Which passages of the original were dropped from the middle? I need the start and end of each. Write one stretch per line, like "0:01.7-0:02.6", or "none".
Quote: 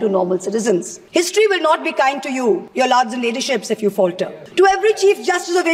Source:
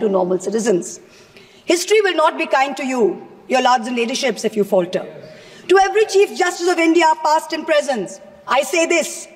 0:01.0-0:01.5
0:03.2-0:03.4
0:05.1-0:05.5